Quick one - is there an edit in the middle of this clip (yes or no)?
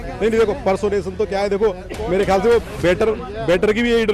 no